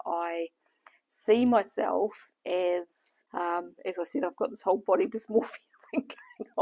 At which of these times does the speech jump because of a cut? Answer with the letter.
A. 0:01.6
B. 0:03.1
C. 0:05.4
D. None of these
B